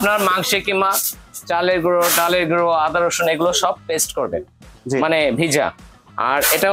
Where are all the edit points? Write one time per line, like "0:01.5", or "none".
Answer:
none